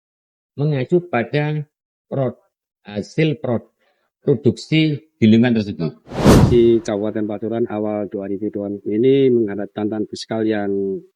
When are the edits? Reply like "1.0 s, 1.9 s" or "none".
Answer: 6.4 s